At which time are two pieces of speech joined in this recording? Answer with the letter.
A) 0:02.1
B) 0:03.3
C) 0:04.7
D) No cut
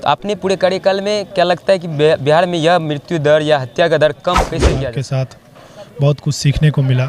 C